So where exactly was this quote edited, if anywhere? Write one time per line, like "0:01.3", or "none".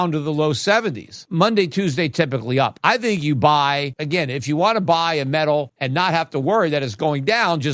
0:01.1
0:02.8
0:03.9
0:05.8